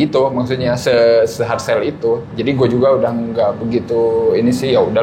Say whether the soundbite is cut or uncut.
uncut